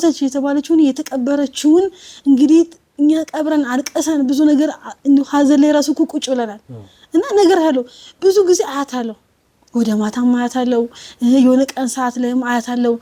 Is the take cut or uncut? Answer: uncut